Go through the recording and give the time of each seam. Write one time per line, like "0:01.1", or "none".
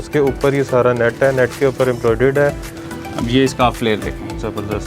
0:02.7